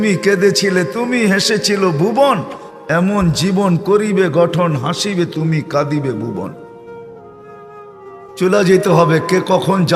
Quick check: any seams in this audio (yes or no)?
no